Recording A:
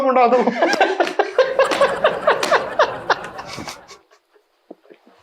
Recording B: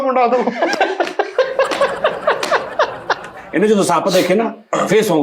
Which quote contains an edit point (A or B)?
B